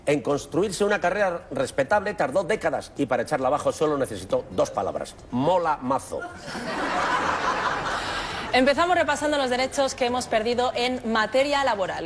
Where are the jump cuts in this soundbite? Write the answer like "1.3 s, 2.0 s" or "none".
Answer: 2.8 s

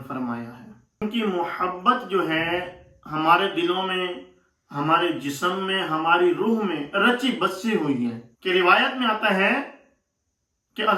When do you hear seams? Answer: 1.0 s, 8.3 s

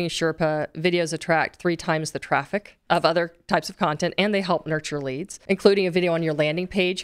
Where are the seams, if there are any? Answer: 2.7 s, 5.3 s

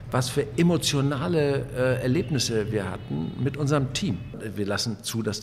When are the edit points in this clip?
4.5 s

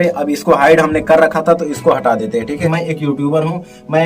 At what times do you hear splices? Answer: 2.7 s

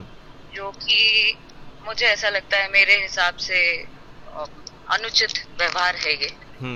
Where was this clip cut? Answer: none

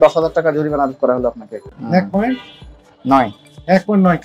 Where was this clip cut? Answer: 1.7 s

